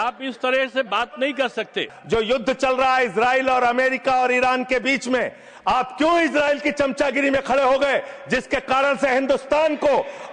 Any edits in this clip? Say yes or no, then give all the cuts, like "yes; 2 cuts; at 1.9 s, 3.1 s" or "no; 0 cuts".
yes; 1 cut; at 1.9 s